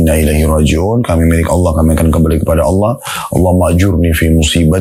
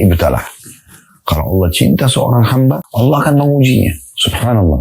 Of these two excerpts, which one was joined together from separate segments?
second; 1 cut; at 2.9 s

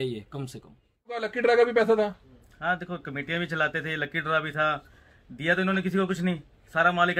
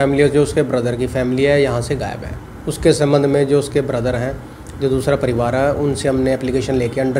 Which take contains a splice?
first; 1 cut; at 1.3 s

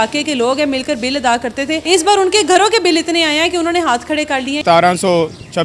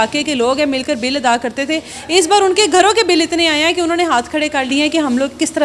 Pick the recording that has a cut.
first; 2 cuts; at 1.8 s, 4.6 s

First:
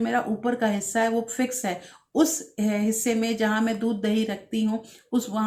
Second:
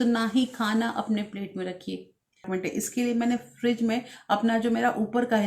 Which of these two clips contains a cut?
second; 1 cut; at 2.5 s

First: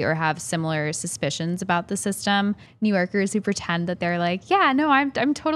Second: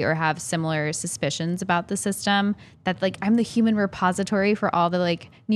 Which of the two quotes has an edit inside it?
first; 1 cut; at 2.7 s

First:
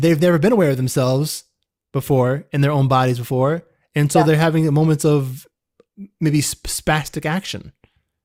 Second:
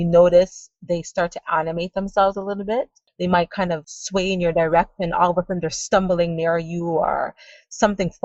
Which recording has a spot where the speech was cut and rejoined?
second; 2 cuts; at 3.1 s, 3.9 s

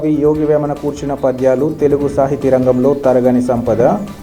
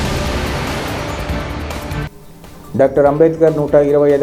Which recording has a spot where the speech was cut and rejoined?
second; 1 cut; at 2.0 s

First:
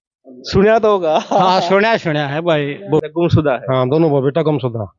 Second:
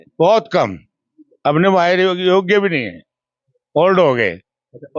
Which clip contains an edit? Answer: first; 1 cut; at 3.0 s

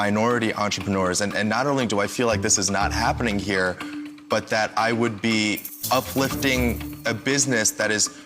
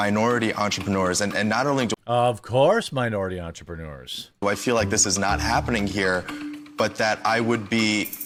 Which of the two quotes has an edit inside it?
first; 2 cuts; at 1.9 s, 5.7 s

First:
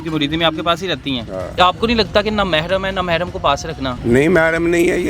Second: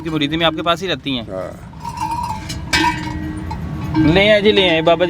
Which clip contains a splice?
first; 2 cuts; at 1.5 s, 4.0 s

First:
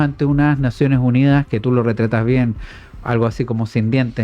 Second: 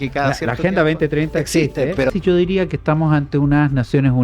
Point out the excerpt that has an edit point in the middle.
second; 1 cut; at 2.1 s

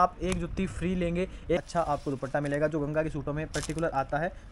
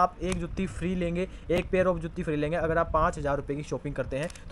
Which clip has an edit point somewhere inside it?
first; 1 cut; at 1.6 s

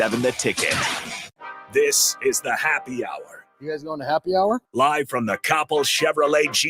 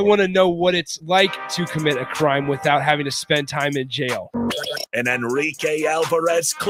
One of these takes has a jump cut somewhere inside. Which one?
first; 1 cut; at 1.1 s

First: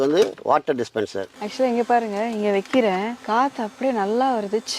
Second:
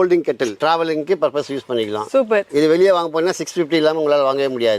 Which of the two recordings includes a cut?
first; 1 cut; at 1.4 s

